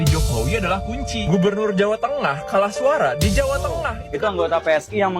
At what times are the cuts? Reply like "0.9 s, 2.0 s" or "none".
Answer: 4.0 s